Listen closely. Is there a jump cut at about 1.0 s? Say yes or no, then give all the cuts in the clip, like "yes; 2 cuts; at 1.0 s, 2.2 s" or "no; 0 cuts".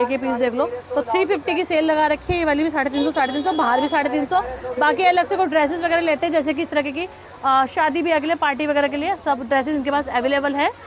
no; 0 cuts